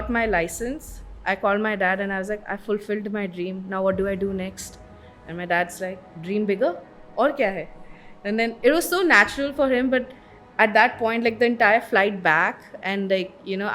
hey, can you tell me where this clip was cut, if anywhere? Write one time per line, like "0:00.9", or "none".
none